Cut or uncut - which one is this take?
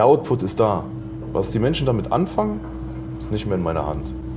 uncut